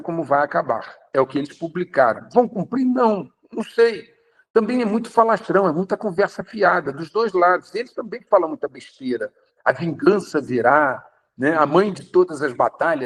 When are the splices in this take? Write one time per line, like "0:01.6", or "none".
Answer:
none